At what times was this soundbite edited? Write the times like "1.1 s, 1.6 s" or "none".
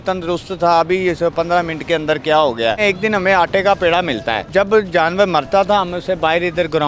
2.8 s, 4.5 s